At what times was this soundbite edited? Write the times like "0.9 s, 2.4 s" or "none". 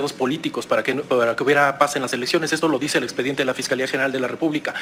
none